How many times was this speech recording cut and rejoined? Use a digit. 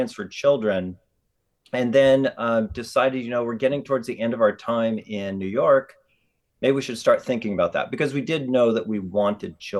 0